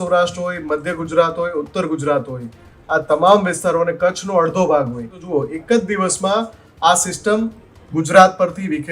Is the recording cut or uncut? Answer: cut